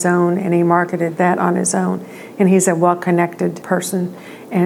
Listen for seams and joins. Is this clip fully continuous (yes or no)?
no